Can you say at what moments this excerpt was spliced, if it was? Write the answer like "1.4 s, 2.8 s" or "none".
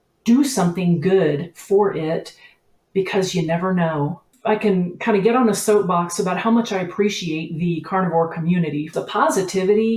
4.3 s, 8.9 s